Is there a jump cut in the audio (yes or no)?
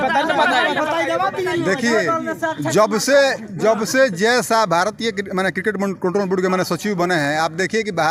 no